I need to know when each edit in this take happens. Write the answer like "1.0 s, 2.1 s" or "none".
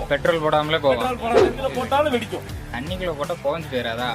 1.4 s